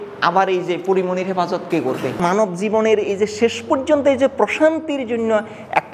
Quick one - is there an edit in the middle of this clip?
yes; 1 cut; at 2.2 s

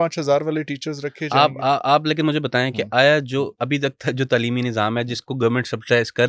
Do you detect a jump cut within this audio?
no; 0 cuts

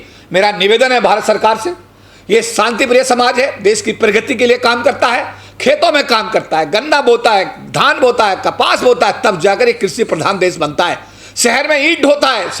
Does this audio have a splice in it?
no; 0 cuts

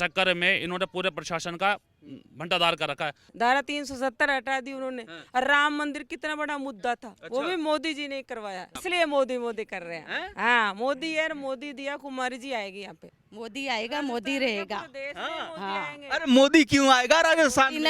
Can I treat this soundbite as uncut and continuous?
no; 2 cuts; at 3.2 s, 13.1 s

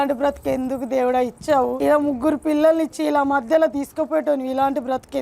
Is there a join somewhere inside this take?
yes; 1 cut; at 1.8 s

